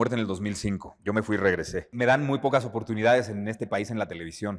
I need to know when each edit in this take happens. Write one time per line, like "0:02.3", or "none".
0:01.9